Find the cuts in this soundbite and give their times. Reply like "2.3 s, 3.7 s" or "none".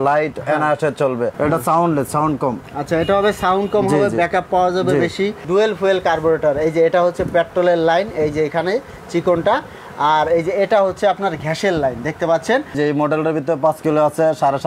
1.3 s, 5.4 s, 12.7 s